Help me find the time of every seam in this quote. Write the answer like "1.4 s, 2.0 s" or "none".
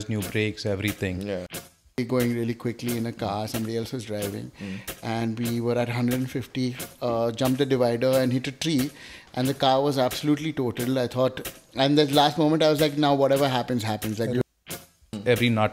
1.9 s, 14.7 s